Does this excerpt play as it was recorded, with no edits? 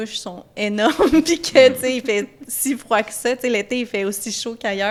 yes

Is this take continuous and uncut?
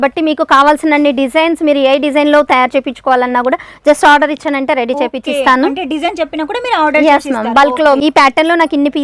yes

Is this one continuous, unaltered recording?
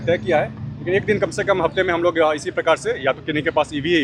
yes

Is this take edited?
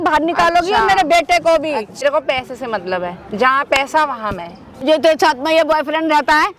yes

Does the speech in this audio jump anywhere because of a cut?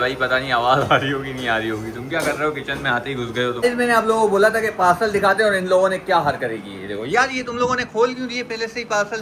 yes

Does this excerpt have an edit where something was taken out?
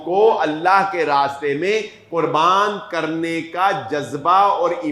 no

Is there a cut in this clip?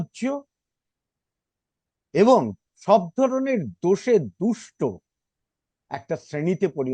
no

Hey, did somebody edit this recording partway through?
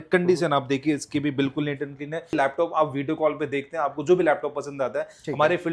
yes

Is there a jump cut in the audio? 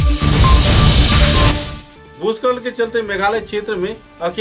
yes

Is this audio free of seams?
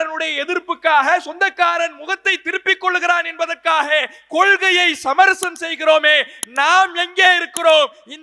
yes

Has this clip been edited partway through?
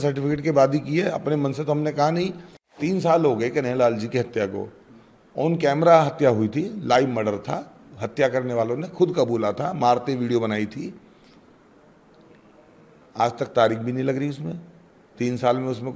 yes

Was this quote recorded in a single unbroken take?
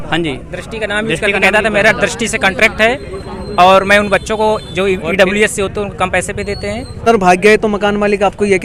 yes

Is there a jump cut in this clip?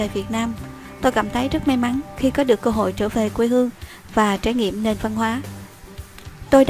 yes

